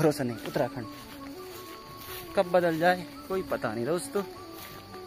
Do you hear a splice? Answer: no; 0 cuts

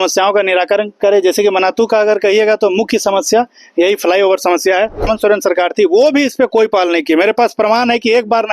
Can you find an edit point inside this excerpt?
yes; 1 cut; at 5.1 s

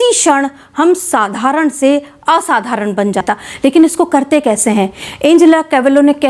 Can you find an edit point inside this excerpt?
yes; 1 cut; at 3.2 s

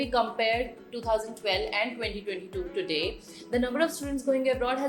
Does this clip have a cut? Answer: no; 0 cuts

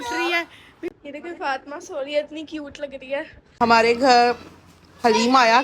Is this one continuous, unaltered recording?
no; 2 cuts; at 0.9 s, 3.4 s

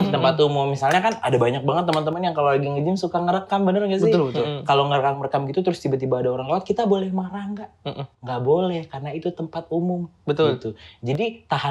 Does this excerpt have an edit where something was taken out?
no; 0 cuts

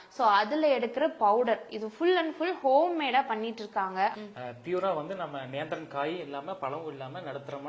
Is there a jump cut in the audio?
yes; 1 cut; at 4.1 s

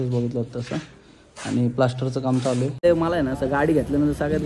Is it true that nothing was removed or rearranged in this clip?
no; 1 cut; at 2.8 s

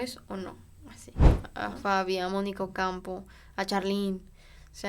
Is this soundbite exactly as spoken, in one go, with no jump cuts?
no; 1 cut; at 1.5 s

